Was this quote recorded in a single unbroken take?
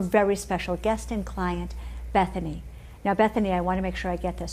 no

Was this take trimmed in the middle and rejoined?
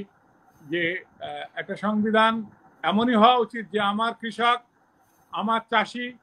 no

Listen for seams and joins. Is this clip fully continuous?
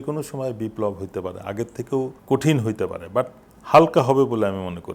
no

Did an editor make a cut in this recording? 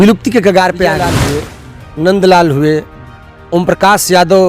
yes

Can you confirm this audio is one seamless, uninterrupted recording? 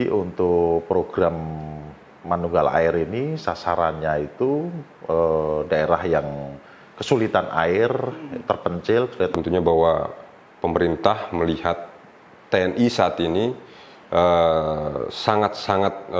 no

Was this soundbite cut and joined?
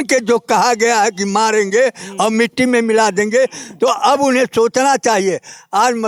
no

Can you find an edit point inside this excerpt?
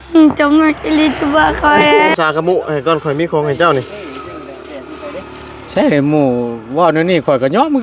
yes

